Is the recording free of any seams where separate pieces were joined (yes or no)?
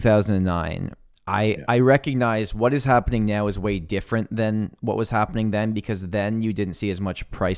yes